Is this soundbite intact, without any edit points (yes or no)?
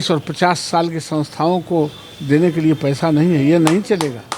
yes